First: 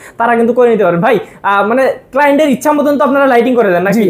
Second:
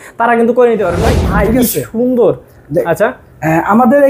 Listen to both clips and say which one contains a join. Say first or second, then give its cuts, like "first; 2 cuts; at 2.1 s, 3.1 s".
second; 1 cut; at 1.2 s